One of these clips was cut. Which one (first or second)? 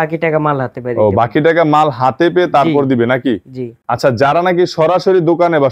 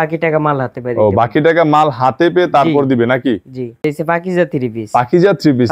second